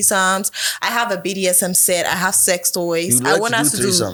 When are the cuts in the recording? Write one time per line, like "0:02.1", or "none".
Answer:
none